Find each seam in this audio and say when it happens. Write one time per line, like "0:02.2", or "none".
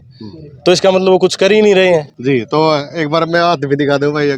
0:02.1